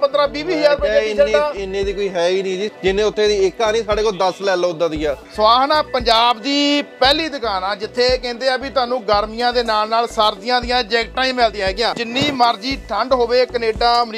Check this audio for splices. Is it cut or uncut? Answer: cut